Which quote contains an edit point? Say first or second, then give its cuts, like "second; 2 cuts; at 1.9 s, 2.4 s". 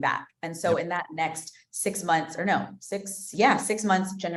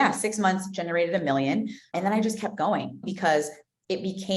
second; 2 cuts; at 1.9 s, 3.1 s